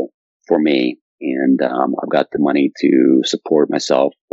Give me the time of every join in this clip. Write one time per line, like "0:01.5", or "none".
none